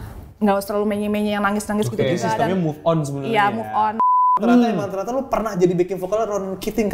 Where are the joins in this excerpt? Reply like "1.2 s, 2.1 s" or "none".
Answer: 4.2 s